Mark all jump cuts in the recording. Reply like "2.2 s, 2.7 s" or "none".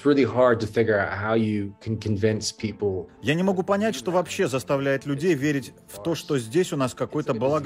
3.0 s